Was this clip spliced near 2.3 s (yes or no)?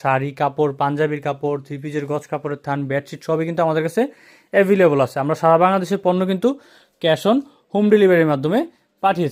no